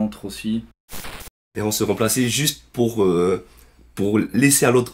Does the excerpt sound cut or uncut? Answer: cut